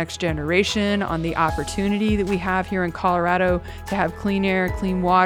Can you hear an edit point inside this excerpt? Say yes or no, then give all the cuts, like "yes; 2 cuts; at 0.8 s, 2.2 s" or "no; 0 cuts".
no; 0 cuts